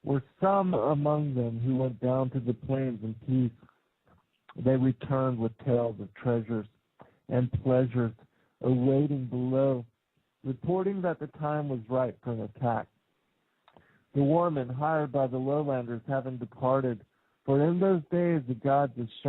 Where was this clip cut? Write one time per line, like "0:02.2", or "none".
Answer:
0:06.4